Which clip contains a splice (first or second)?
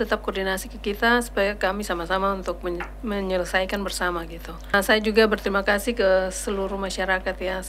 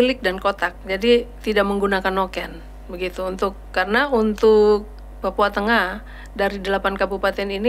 first